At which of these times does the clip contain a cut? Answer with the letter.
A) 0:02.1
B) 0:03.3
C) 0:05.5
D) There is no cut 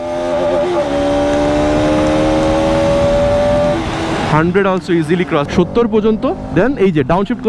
C